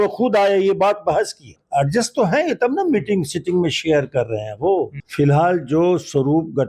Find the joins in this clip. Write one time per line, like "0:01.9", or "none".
0:01.6
0:05.0